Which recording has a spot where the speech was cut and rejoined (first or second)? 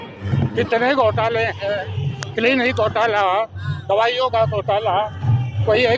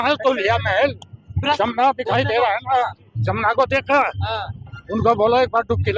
second